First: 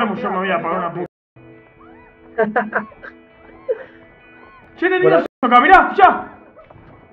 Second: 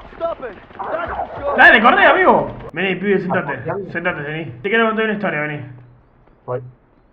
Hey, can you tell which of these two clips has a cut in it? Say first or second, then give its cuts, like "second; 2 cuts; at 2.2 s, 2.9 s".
second; 2 cuts; at 2.6 s, 4.5 s